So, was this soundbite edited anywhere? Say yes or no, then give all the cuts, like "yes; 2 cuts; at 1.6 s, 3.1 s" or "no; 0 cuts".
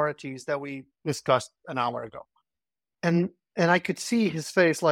yes; 1 cut; at 0.9 s